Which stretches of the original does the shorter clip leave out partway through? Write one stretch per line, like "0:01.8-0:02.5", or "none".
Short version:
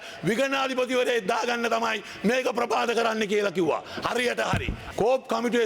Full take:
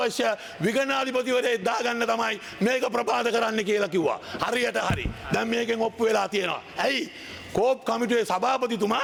0:05.1-0:07.3